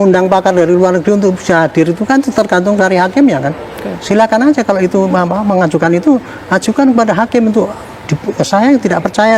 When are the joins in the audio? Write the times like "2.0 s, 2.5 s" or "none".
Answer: none